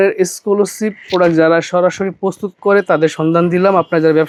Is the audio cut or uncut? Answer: uncut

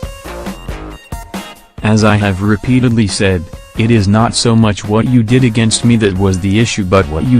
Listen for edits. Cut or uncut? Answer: cut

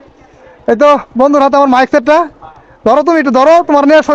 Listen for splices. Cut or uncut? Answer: uncut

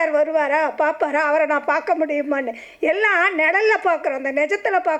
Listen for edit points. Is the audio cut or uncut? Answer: uncut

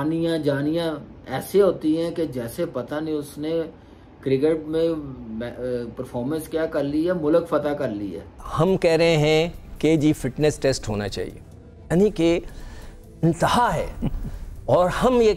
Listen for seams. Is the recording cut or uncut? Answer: cut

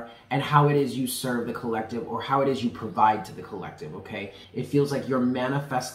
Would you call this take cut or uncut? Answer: cut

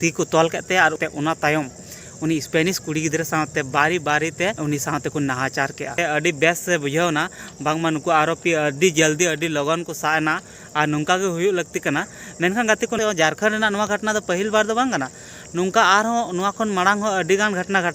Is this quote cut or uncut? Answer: cut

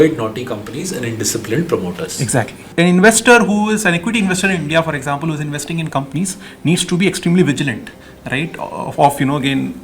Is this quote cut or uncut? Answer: cut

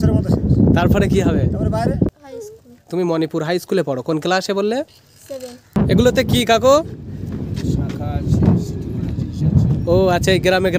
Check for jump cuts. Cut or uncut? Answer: cut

